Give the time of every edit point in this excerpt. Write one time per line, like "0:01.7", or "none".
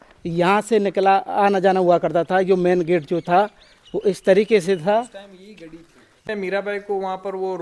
0:06.2